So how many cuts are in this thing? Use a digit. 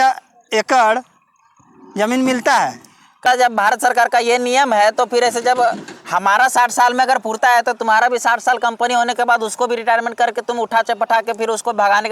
1